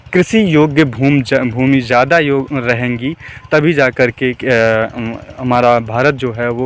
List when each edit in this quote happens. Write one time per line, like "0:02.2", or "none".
none